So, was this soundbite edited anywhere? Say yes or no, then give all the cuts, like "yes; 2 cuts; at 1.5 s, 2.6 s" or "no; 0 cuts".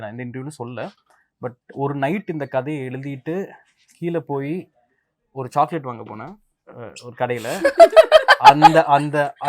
no; 0 cuts